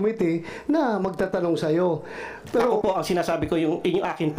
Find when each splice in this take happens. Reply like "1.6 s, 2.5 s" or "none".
2.8 s